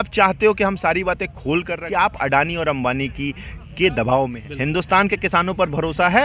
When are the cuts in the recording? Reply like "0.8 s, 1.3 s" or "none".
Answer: 1.7 s, 4.4 s